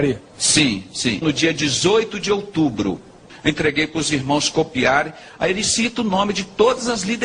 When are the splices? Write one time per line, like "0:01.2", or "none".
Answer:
0:03.3